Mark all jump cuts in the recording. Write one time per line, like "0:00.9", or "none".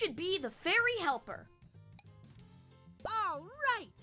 0:01.5
0:03.1